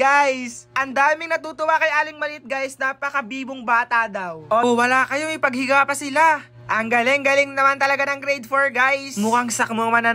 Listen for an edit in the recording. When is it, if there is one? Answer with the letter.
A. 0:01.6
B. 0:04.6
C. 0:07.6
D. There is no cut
B